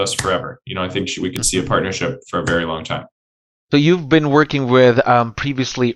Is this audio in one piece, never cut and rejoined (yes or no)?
yes